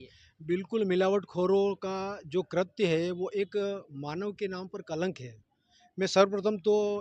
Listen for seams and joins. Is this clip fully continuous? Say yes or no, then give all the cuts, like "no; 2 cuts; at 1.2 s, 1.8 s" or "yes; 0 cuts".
yes; 0 cuts